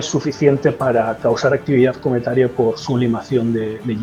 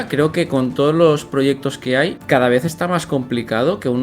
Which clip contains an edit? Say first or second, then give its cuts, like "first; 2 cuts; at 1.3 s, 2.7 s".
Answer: second; 1 cut; at 2.2 s